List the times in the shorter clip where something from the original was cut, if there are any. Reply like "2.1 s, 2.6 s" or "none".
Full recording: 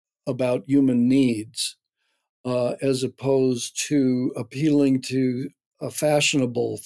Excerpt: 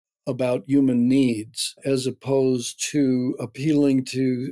1.8 s